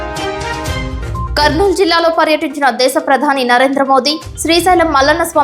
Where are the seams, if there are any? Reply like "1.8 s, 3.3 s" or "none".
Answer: 1.3 s